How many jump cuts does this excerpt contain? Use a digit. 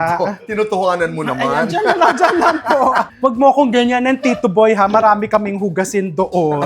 1